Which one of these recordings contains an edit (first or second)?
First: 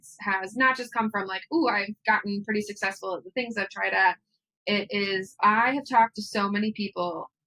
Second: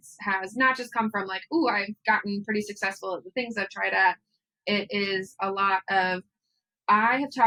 first